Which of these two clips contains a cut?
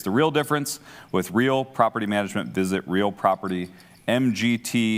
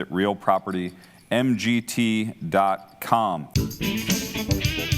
second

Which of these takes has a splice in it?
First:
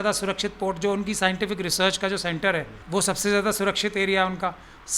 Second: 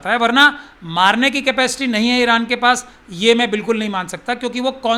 first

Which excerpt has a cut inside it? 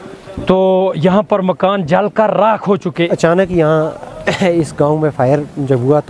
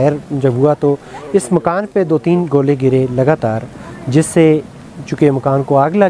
first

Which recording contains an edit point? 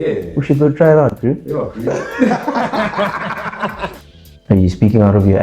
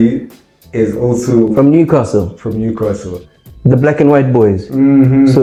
first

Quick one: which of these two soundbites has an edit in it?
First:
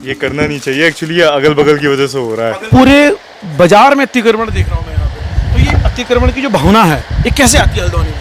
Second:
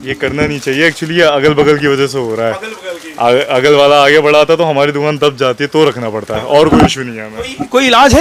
first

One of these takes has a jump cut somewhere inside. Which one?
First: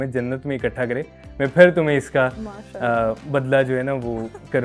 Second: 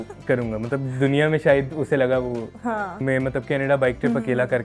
second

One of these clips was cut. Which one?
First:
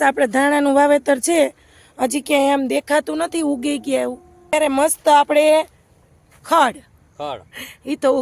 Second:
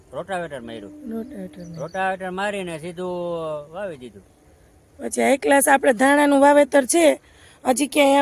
first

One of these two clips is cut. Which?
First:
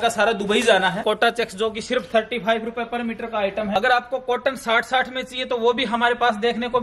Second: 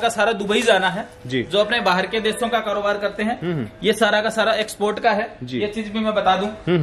first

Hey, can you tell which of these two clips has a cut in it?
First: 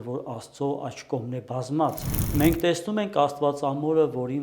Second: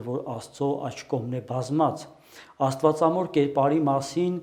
first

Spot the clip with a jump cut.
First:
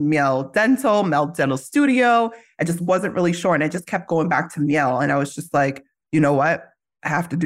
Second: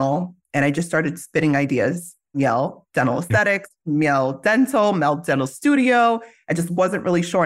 second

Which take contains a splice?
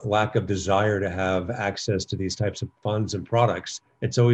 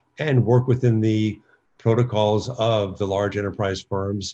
first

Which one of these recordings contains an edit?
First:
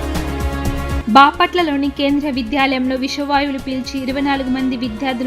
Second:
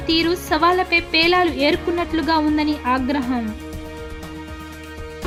first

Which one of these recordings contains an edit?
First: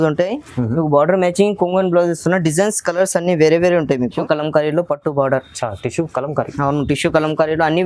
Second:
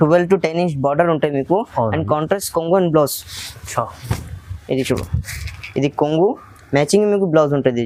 first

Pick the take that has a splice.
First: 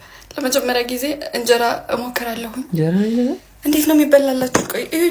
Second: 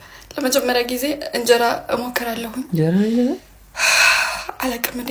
first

